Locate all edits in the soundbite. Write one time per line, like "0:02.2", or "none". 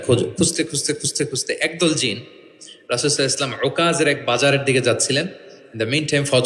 none